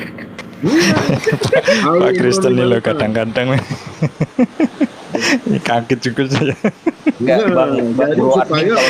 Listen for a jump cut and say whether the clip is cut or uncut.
uncut